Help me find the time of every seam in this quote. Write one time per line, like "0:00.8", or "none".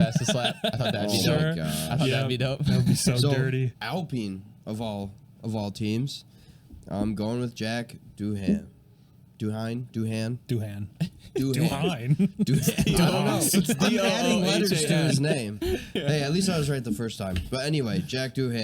0:03.7